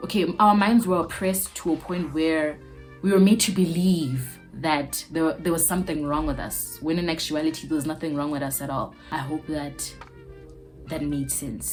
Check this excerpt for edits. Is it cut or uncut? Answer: uncut